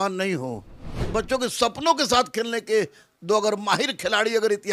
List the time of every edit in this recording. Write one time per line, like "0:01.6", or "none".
0:01.1